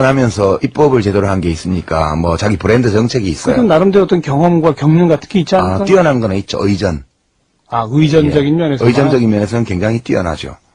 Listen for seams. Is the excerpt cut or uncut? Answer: cut